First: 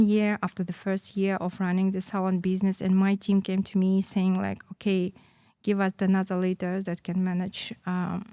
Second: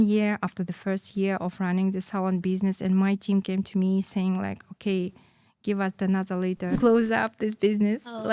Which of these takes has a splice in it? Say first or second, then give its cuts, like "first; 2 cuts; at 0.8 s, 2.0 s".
second; 1 cut; at 6.8 s